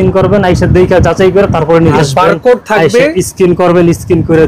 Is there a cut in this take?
yes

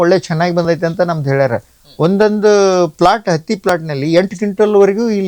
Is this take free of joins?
yes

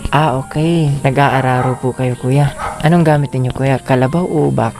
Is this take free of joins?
no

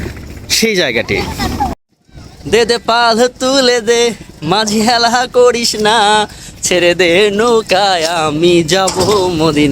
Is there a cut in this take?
yes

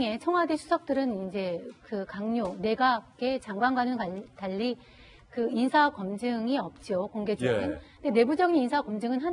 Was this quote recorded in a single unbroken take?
no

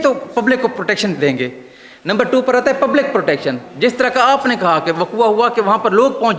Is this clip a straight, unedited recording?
yes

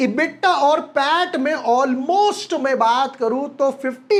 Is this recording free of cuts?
yes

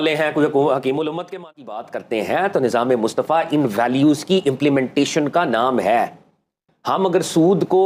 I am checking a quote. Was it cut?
yes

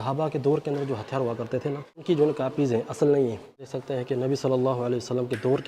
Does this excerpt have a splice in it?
yes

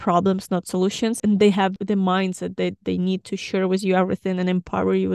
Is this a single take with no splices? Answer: yes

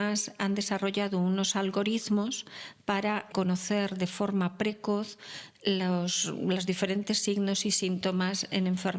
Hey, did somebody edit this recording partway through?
yes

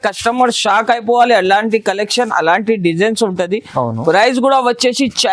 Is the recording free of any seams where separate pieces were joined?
yes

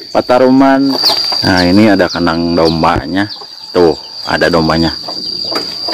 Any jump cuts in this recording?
yes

